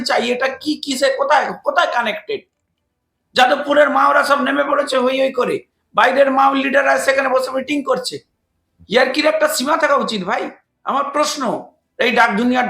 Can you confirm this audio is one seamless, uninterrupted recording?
no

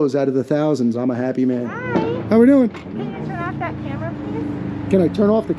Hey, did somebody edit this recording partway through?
yes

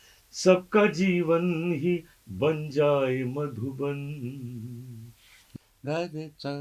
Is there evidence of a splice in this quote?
yes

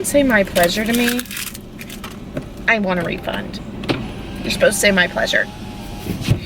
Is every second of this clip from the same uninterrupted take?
yes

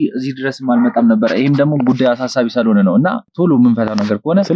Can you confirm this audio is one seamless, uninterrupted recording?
yes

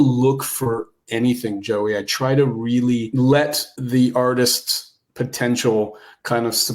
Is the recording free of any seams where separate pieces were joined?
no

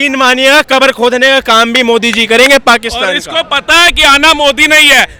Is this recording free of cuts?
yes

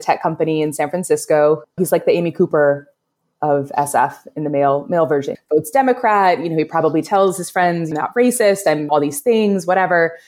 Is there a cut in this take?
no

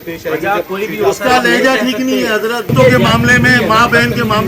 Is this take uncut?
no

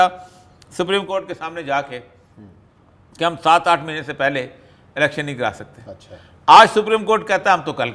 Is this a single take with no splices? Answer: yes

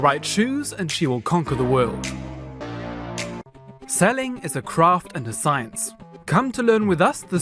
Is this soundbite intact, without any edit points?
no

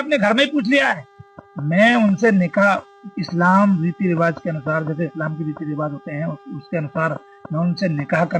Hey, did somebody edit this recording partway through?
no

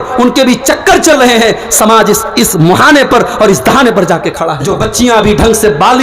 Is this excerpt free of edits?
no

